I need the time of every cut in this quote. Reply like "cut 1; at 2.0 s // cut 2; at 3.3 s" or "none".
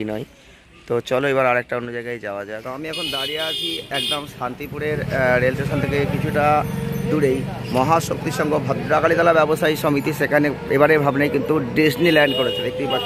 none